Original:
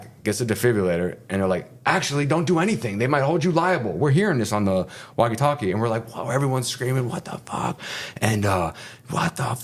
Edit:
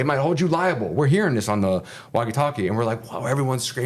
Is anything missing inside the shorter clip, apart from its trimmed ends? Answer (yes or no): no